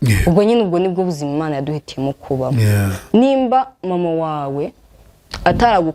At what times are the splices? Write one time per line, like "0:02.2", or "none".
none